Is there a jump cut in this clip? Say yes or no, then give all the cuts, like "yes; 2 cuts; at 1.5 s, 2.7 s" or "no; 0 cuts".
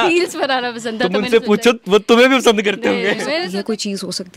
yes; 1 cut; at 3.4 s